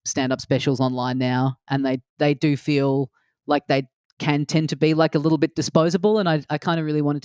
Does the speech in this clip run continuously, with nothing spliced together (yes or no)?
yes